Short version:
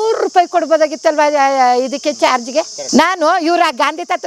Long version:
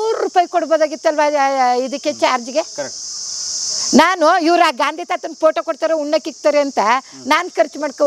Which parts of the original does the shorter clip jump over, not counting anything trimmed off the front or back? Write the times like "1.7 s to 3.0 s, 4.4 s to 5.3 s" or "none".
2.8 s to 3.8 s